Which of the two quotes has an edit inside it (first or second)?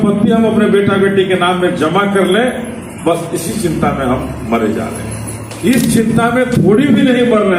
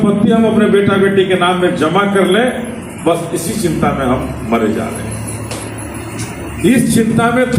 first